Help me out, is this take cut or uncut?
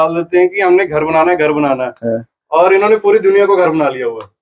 uncut